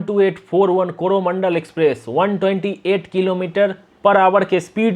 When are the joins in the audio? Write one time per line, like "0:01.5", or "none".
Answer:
none